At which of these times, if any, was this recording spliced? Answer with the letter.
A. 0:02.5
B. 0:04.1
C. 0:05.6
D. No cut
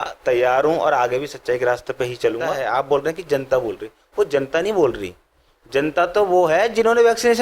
A